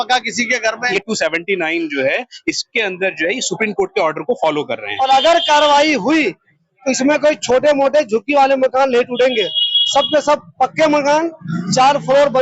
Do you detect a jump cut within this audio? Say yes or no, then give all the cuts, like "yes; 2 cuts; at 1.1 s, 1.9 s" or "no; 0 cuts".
yes; 2 cuts; at 0.9 s, 4.9 s